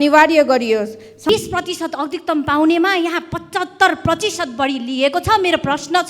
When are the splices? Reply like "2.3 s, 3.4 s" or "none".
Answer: 1.3 s